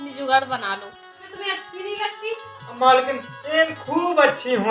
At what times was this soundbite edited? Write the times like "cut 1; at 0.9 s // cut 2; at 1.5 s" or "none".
cut 1; at 1.3 s